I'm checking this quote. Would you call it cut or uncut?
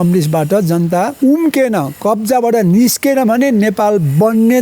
cut